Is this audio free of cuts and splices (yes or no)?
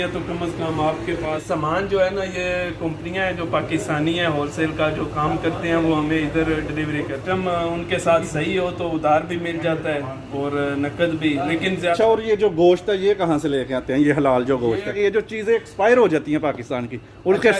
no